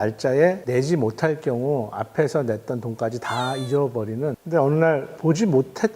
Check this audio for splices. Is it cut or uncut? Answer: cut